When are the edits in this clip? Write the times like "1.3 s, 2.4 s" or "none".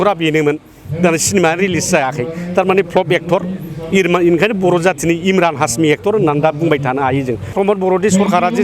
7.5 s